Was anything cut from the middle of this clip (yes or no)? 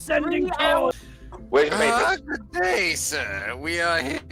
yes